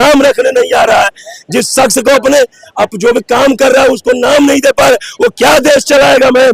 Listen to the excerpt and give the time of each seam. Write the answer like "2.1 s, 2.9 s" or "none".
none